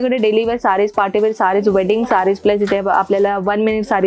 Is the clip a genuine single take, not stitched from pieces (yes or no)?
yes